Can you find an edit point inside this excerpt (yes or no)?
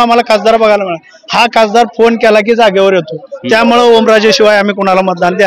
no